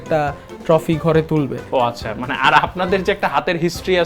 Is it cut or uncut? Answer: cut